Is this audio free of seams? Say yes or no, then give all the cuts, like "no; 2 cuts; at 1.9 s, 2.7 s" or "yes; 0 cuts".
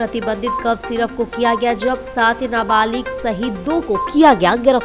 yes; 0 cuts